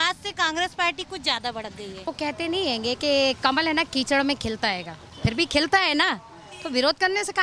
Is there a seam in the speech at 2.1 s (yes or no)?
yes